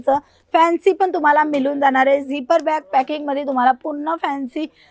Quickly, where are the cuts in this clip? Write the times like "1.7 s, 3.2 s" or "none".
none